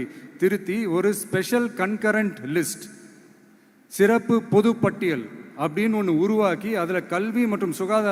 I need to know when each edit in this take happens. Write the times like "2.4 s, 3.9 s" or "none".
none